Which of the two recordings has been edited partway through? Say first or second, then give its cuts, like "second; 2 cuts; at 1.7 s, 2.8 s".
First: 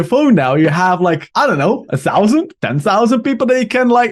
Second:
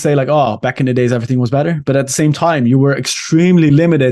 first; 2 cuts; at 1.3 s, 2.6 s